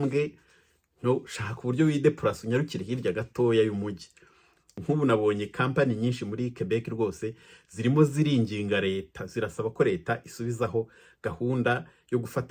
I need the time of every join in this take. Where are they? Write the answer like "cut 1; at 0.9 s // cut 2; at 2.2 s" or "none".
cut 1; at 4.8 s